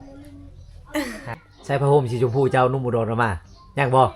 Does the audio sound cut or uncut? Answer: cut